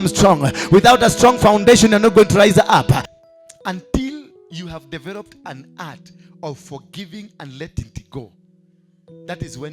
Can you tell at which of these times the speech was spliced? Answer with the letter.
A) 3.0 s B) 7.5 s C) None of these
A